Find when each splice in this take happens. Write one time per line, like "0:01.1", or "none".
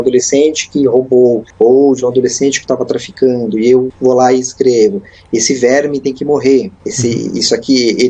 0:01.5
0:03.9
0:06.8